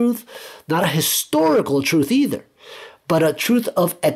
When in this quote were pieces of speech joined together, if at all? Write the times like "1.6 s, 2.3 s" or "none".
none